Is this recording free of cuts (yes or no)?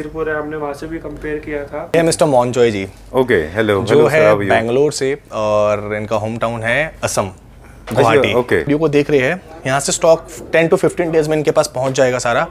no